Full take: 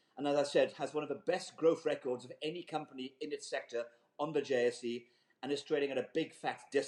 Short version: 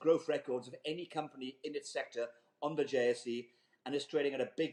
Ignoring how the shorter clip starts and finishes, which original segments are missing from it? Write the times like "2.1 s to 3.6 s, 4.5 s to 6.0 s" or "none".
none